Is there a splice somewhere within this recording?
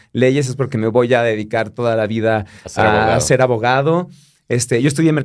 no; 0 cuts

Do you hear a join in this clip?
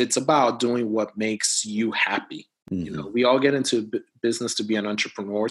no; 0 cuts

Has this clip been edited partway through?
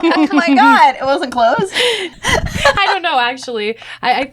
yes; 1 cut; at 2.1 s

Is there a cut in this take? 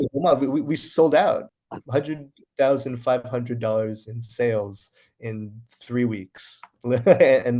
yes; 1 cut; at 1.5 s

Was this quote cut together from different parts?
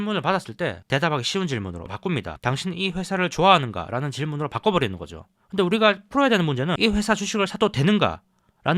yes; 1 cut; at 6.8 s

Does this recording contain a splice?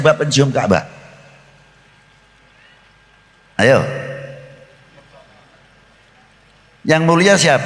no; 0 cuts

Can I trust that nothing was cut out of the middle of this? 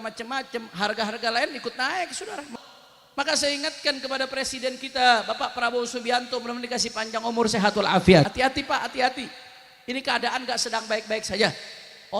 no; 2 cuts; at 2.4 s, 8.3 s

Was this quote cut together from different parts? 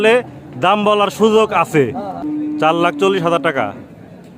yes; 1 cut; at 2.2 s

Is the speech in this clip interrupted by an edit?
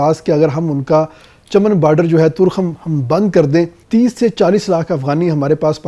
yes; 1 cut; at 3.8 s

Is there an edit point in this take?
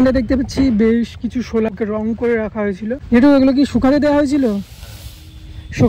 yes; 2 cuts; at 1.7 s, 3.0 s

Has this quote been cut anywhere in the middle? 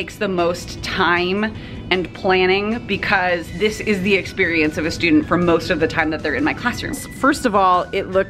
yes; 1 cut; at 7.0 s

